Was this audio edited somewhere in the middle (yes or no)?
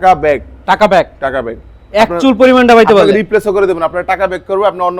no